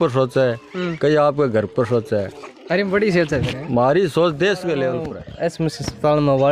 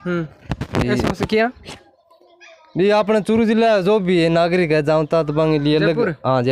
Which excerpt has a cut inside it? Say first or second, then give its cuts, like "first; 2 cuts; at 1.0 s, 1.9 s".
first; 1 cut; at 5.2 s